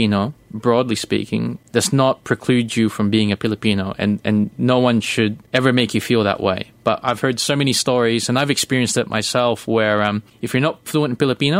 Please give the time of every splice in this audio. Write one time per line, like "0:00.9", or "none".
0:01.6
0:05.4
0:10.3